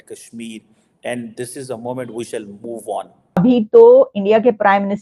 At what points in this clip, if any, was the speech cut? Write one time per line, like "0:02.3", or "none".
0:03.4